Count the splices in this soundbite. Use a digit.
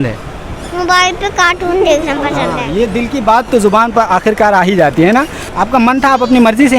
1